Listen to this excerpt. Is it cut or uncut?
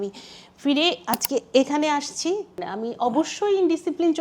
cut